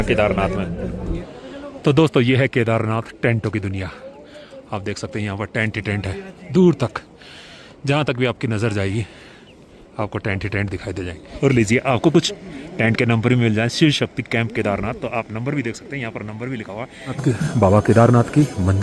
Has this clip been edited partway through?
yes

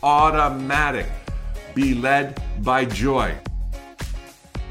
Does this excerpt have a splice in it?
yes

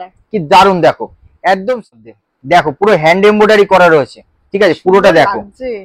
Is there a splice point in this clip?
yes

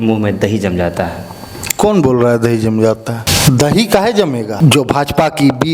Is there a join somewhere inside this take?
yes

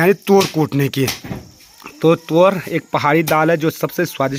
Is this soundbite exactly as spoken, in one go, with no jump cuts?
yes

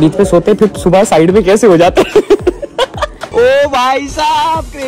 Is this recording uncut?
no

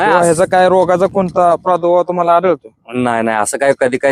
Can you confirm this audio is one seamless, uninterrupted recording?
yes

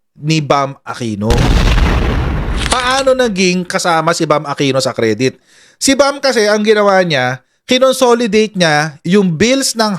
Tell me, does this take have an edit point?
no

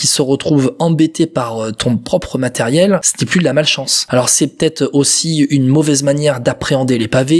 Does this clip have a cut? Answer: yes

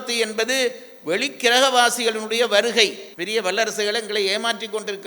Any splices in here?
yes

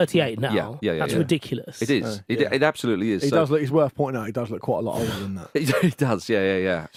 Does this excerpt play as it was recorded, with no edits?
yes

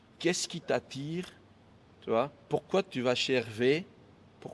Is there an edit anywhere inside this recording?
no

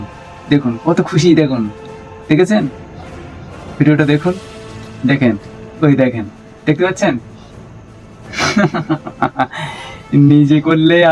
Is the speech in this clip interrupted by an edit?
no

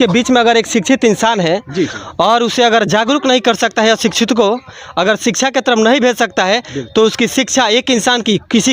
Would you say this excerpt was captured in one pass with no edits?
yes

